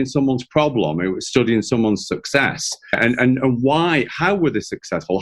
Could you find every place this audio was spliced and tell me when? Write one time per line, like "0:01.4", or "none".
0:03.0